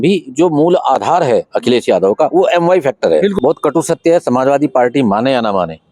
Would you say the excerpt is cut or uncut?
cut